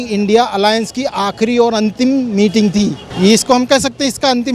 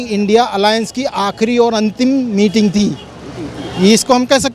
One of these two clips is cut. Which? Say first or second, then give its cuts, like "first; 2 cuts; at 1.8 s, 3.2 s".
first; 1 cut; at 3.0 s